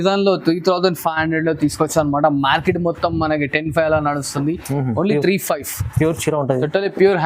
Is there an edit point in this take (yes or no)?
no